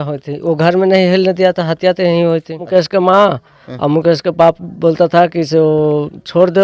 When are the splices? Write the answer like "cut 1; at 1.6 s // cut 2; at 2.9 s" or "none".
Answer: cut 1; at 2.6 s

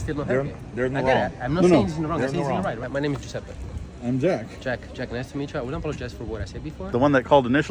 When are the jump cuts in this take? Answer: cut 1; at 2.8 s // cut 2; at 6.7 s

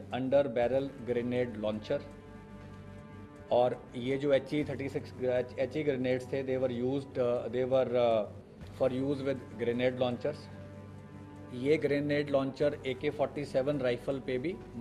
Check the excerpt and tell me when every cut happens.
none

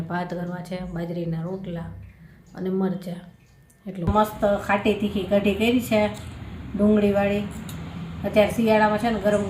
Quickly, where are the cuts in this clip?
cut 1; at 4.1 s

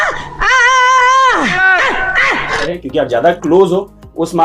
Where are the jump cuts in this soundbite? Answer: cut 1; at 2.7 s

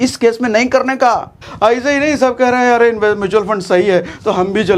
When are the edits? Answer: cut 1; at 1.4 s

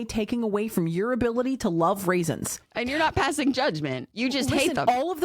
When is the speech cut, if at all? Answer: cut 1; at 4.0 s

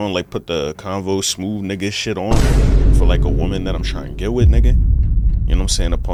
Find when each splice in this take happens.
none

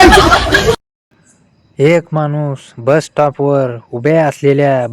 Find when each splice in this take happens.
cut 1; at 0.9 s

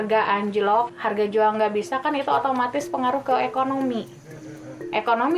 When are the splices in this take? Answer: cut 1; at 0.9 s

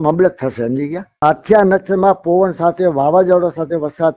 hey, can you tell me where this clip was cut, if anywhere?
cut 1; at 1.2 s

